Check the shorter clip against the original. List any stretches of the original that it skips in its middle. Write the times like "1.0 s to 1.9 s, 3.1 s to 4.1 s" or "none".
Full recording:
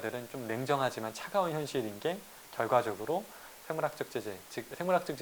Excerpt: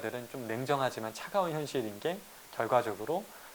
none